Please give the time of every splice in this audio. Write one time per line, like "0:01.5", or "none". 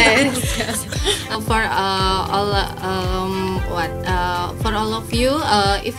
0:01.4